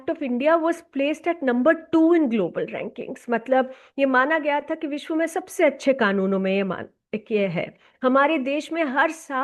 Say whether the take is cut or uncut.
cut